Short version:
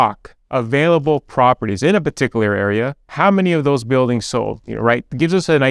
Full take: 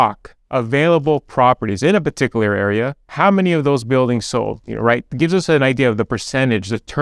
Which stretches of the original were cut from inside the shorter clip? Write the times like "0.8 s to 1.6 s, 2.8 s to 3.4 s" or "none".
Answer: none

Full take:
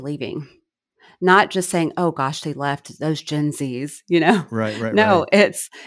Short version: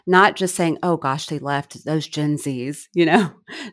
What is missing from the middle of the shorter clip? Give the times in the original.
none

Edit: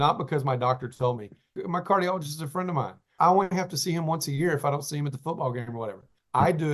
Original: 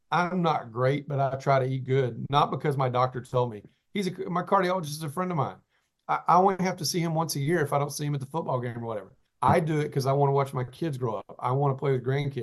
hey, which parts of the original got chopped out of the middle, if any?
3.8 s to 4.1 s, 5.7 s to 6.2 s

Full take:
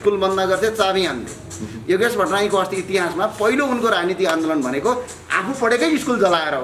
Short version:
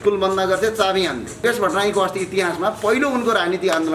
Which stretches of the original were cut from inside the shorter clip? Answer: 1.4 s to 2.0 s

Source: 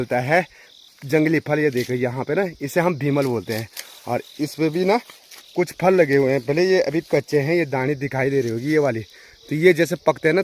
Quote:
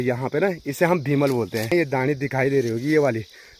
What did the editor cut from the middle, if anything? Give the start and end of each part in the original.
3.6 s to 7.5 s

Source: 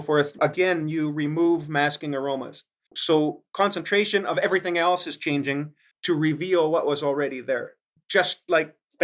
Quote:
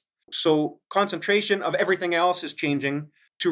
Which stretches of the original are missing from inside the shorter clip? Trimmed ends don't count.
none

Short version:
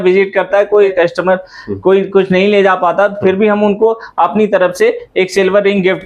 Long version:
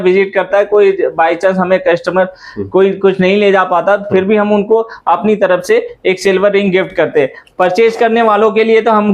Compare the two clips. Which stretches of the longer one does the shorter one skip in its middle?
0.9 s to 1.8 s

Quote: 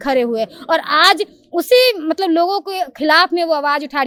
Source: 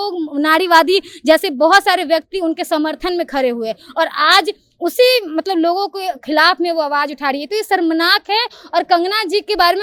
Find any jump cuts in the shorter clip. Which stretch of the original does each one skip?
none

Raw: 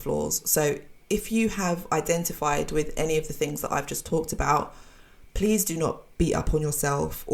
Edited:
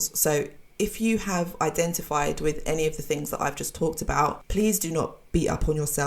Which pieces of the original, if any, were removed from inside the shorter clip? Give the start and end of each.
4.7 s to 5.3 s

